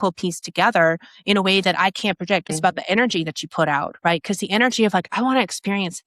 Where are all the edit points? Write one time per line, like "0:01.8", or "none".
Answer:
0:02.6